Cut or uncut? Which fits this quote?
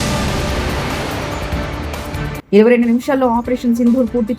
cut